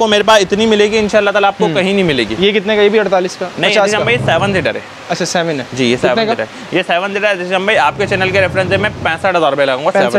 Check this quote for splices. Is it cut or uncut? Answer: uncut